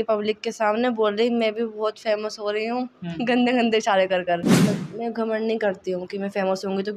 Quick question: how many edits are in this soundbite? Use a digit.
1